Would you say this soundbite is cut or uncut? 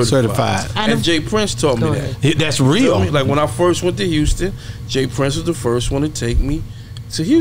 uncut